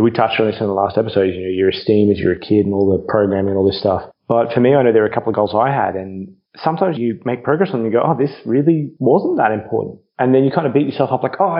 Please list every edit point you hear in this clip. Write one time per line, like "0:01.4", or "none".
0:07.0